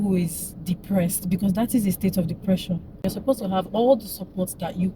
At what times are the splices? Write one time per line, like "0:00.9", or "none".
0:03.0